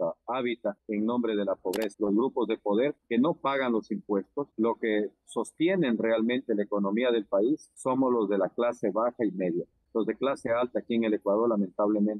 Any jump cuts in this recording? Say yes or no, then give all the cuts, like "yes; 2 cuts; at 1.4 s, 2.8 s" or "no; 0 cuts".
yes; 1 cut; at 1.9 s